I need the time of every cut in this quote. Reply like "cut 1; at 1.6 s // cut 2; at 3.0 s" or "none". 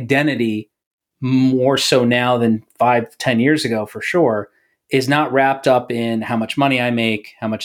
none